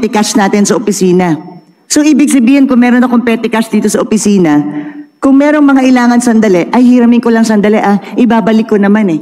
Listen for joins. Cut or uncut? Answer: uncut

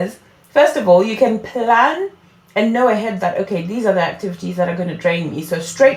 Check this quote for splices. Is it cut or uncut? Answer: uncut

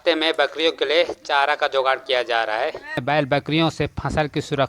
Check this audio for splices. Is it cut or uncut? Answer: cut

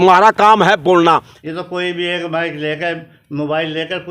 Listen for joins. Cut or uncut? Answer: cut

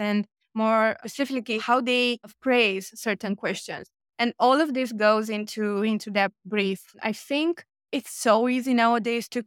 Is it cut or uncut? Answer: cut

